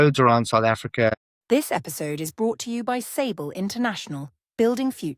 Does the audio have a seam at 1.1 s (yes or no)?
yes